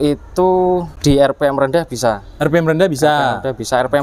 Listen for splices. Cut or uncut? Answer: cut